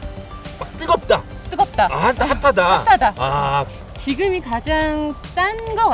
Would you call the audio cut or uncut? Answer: cut